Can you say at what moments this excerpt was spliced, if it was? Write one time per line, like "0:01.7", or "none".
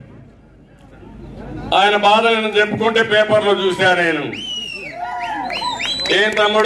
none